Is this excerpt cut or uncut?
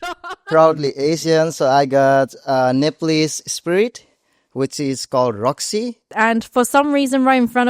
cut